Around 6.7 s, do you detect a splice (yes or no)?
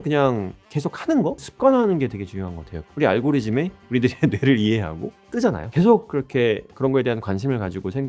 no